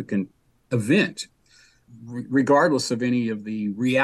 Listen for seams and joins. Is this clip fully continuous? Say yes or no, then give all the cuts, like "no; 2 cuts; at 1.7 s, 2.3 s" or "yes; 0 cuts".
yes; 0 cuts